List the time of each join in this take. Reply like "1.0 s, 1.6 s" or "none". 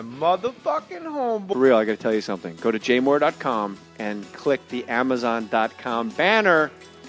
none